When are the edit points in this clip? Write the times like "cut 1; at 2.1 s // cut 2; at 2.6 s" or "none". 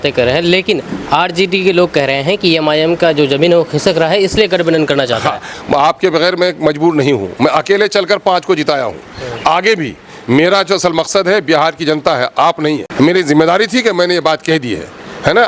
cut 1; at 5.6 s // cut 2; at 12.9 s